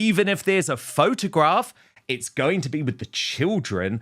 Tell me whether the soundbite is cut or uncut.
uncut